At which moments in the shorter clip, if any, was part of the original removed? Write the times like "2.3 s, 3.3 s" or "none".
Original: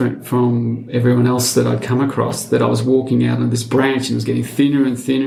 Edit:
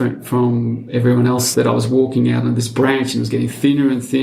1.5 s